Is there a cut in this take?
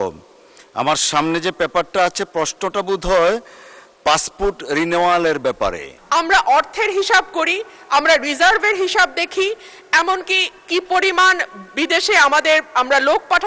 yes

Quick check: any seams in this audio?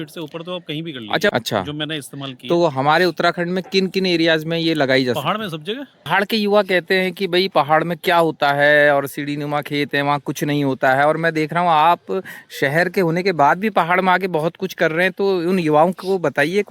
yes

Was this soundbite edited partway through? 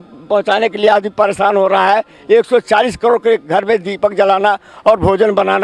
no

